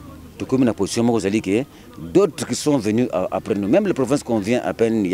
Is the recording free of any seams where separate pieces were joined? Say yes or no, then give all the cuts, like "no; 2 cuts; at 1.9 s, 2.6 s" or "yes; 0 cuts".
yes; 0 cuts